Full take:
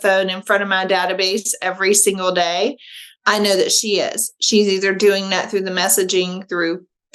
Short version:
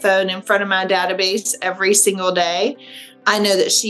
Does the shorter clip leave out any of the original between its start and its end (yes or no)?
no